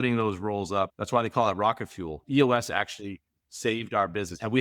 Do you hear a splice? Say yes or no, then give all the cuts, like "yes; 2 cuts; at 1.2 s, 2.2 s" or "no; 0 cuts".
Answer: yes; 2 cuts; at 1.0 s, 2.1 s